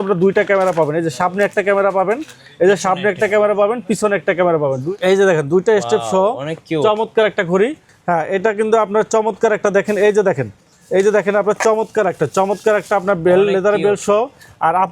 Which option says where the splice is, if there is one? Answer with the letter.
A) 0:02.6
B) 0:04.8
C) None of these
B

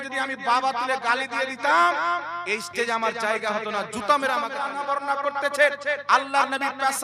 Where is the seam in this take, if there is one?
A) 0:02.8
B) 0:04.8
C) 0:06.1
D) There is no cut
B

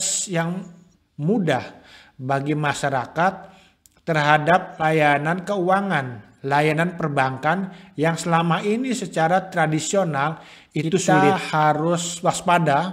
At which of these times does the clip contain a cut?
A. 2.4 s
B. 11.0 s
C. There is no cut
B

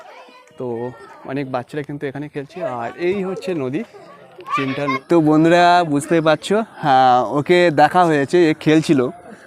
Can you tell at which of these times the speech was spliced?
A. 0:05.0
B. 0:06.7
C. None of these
A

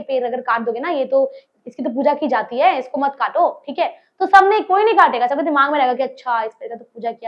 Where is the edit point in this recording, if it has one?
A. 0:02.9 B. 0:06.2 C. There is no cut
C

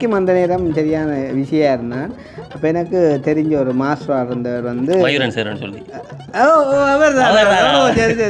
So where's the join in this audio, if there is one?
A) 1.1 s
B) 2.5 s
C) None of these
C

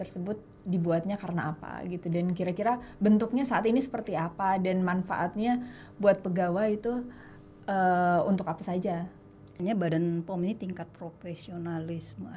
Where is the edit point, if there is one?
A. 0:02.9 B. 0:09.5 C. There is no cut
B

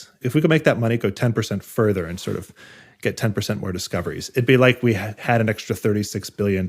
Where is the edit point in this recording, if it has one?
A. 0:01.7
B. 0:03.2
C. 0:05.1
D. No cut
C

